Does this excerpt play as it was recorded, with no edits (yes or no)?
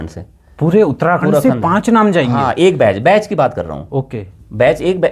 yes